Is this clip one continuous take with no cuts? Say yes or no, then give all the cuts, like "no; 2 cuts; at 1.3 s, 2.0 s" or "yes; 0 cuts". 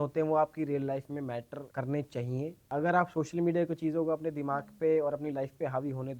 no; 2 cuts; at 1.6 s, 2.6 s